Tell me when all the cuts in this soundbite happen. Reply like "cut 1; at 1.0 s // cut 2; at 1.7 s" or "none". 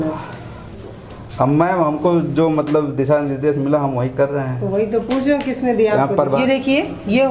cut 1; at 6.4 s